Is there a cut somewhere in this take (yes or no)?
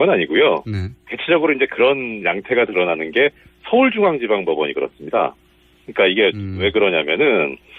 yes